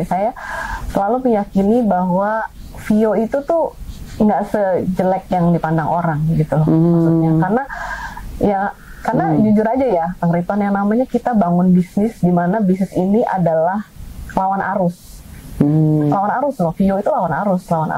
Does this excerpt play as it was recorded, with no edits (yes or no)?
yes